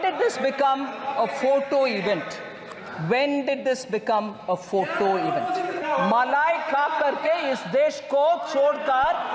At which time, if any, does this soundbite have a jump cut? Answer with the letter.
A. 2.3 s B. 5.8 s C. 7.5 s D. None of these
B